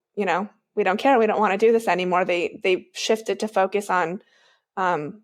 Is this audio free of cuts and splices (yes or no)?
yes